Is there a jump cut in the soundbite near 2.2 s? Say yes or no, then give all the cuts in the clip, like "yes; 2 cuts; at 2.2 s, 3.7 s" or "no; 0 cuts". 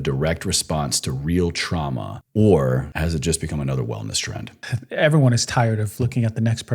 yes; 3 cuts; at 2.2 s, 2.9 s, 4.6 s